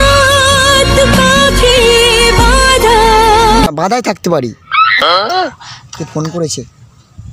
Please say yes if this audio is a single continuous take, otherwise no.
no